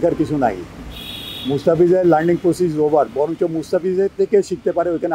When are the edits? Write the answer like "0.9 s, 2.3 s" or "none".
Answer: none